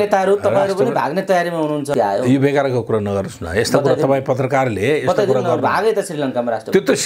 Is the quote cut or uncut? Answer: cut